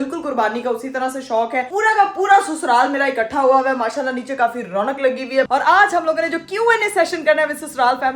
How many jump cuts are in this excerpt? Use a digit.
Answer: 2